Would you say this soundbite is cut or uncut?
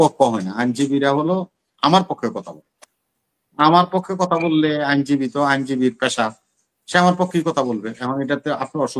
uncut